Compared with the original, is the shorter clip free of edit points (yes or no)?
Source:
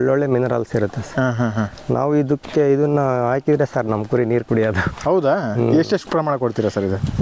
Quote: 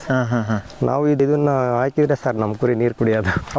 no